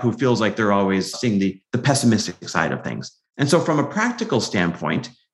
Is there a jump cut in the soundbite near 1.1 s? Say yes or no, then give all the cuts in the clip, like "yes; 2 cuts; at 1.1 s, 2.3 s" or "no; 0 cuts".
yes; 1 cut; at 1.1 s